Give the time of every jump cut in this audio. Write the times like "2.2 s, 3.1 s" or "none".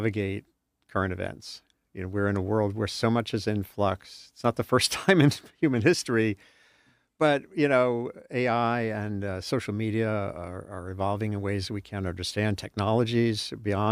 none